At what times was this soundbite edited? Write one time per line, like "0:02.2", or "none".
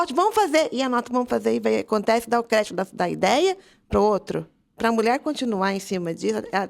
0:04.7

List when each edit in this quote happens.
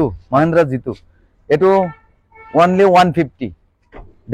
none

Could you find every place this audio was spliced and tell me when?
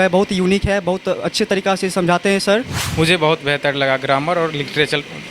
0:02.8

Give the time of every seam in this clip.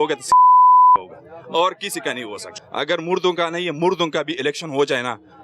0:02.4

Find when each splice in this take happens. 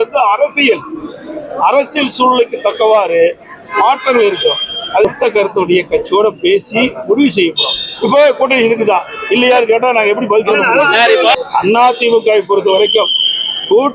0:05.0
0:11.4

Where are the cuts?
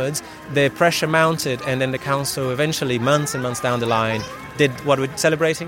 none

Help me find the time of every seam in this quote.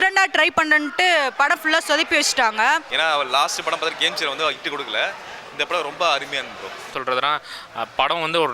0:02.9
0:06.9

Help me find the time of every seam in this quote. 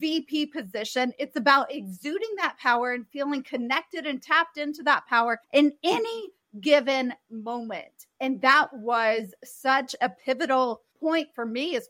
none

